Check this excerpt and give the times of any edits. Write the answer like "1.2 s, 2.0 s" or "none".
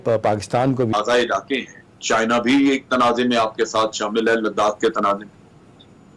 0.9 s